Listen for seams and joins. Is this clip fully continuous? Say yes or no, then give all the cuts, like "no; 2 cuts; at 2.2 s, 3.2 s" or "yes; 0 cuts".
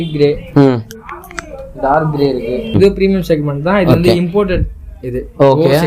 no; 1 cut; at 2.8 s